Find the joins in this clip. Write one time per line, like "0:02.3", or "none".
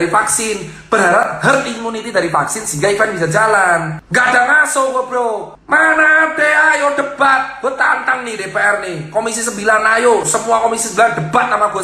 0:04.0
0:05.5